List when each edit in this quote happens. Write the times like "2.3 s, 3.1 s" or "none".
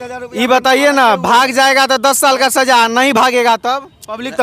none